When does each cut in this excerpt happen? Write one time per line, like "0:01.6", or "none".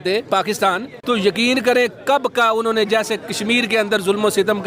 0:00.9